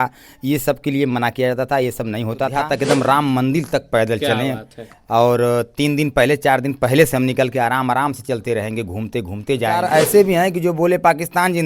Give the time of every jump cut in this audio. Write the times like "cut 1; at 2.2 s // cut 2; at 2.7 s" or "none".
cut 1; at 2.6 s // cut 2; at 9.8 s